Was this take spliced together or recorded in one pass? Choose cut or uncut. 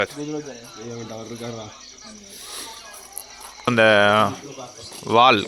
cut